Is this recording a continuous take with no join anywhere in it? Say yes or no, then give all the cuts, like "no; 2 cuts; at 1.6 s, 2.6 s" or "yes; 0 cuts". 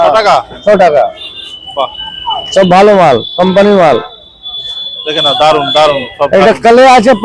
yes; 0 cuts